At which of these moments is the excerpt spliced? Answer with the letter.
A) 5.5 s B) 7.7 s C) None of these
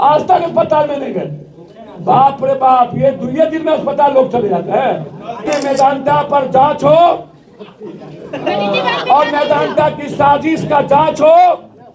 A